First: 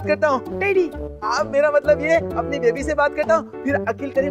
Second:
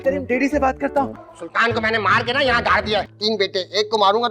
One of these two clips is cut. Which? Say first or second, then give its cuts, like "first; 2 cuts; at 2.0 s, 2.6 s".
second; 2 cuts; at 1.2 s, 3.1 s